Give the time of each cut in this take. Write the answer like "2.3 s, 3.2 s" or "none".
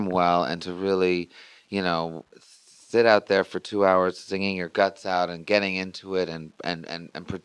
6.0 s